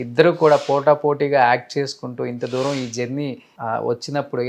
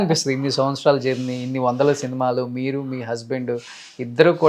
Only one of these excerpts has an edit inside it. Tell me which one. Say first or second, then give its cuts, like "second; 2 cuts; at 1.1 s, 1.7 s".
first; 1 cut; at 3.5 s